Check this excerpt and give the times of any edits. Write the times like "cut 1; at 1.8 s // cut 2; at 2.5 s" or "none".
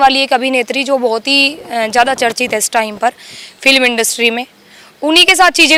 none